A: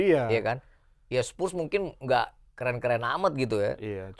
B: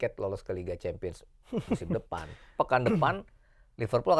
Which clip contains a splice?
B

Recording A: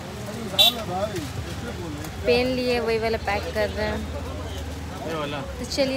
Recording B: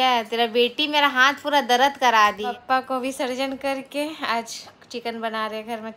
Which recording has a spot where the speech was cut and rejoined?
B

